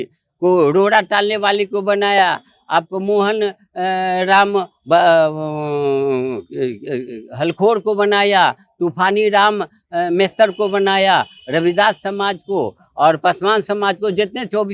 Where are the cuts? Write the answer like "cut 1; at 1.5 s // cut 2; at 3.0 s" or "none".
none

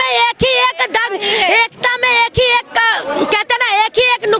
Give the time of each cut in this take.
none

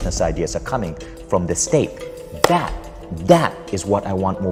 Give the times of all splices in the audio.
none

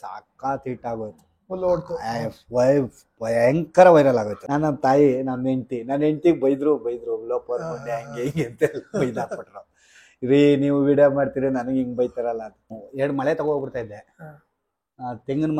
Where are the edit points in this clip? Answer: cut 1; at 4.4 s // cut 2; at 12.8 s

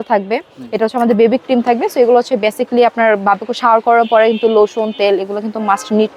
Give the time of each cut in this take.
none

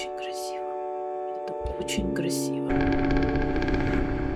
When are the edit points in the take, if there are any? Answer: cut 1; at 2.7 s

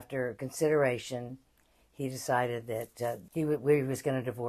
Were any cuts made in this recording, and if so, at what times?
cut 1; at 3.2 s

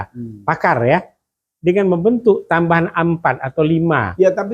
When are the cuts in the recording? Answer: none

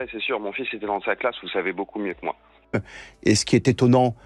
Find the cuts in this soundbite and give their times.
cut 1; at 2.5 s

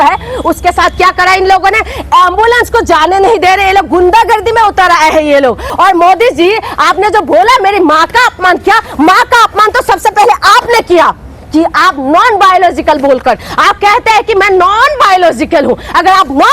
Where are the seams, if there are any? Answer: cut 1; at 5.7 s

